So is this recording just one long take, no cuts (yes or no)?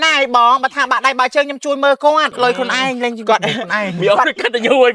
no